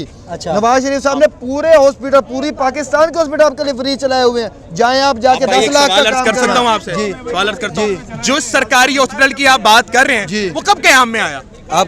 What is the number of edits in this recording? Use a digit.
0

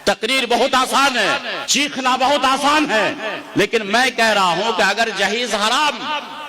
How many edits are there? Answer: 1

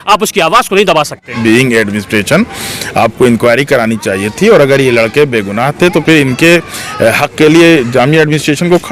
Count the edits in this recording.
1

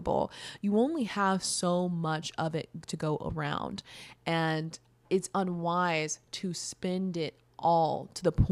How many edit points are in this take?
1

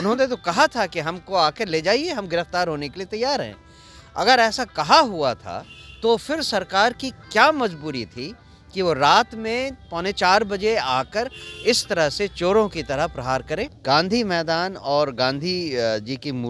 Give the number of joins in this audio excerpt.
1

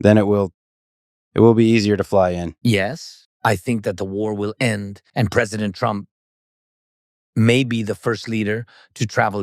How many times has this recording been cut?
1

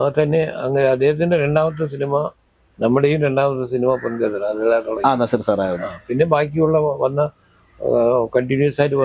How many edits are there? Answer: 0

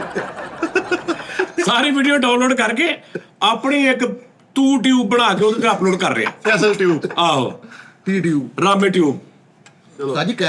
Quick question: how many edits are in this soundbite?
0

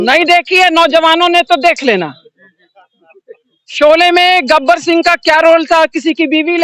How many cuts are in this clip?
0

